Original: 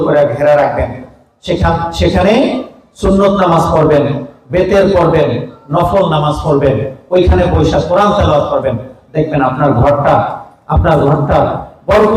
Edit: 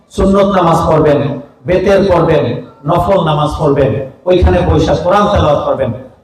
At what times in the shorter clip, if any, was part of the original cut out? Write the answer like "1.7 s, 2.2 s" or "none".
none